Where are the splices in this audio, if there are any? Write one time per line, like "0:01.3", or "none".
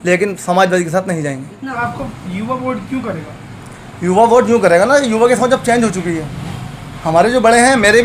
0:01.7